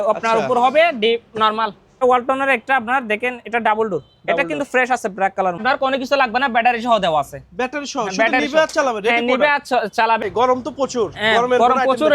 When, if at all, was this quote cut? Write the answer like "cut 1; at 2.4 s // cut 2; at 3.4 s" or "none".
cut 1; at 2.0 s // cut 2; at 5.6 s // cut 3; at 10.2 s